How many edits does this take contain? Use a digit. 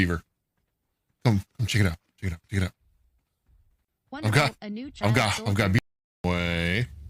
1